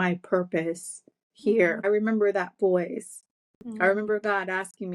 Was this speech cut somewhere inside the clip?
yes; 1 cut; at 1.8 s

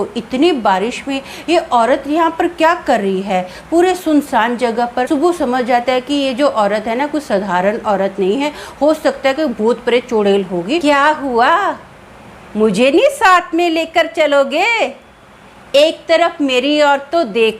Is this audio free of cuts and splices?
no; 2 cuts; at 5.1 s, 10.8 s

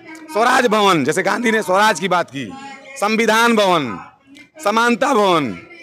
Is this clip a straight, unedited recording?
yes; 0 cuts

